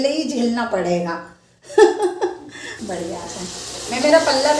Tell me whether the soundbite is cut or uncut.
cut